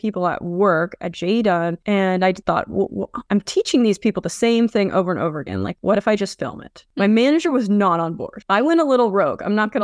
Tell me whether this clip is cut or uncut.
uncut